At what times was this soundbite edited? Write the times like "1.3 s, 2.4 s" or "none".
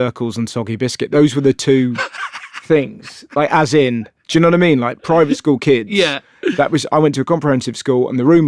none